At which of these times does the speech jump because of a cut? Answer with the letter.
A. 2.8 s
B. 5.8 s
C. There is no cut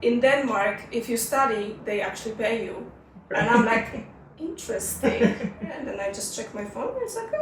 B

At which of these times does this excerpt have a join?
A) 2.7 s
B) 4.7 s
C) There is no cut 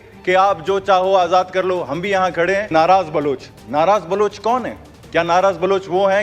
A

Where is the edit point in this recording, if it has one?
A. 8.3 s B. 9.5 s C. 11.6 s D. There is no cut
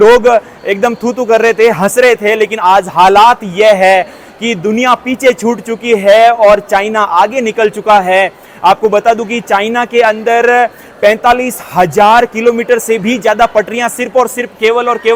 D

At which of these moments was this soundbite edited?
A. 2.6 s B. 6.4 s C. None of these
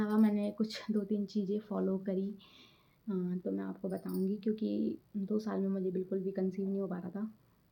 C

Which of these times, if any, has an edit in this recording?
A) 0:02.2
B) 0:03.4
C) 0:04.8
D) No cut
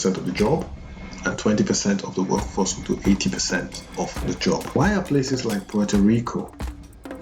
C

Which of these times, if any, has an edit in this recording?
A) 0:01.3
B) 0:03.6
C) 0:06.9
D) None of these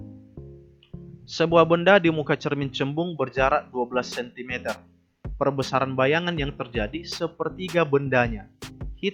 A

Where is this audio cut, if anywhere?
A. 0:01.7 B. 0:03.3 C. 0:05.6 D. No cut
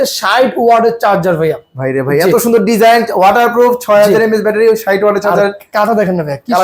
D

